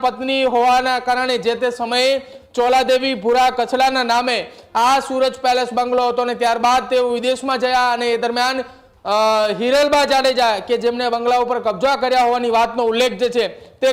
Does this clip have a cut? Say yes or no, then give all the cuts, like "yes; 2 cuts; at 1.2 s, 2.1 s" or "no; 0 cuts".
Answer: no; 0 cuts